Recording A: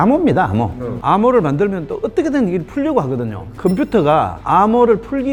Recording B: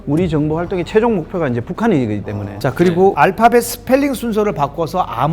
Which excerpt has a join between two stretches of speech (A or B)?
B